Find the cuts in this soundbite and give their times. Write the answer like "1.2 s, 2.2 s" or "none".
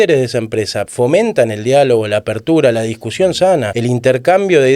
0.9 s, 3.7 s

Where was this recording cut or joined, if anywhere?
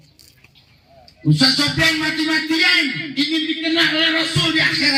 none

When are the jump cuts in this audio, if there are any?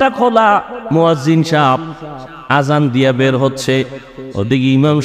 0.9 s

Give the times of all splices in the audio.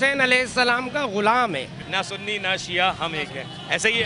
1.8 s

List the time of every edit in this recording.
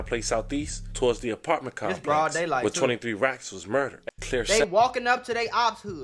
4.0 s

